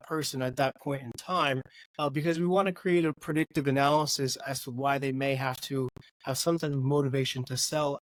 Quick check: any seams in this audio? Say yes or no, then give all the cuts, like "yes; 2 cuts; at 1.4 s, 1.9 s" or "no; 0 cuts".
no; 0 cuts